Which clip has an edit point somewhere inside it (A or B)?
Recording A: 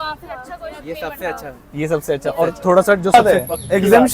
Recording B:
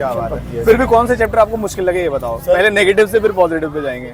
A